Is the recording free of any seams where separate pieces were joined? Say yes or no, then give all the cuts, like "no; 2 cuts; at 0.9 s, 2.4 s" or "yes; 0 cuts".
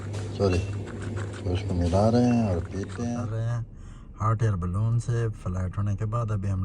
no; 1 cut; at 3.3 s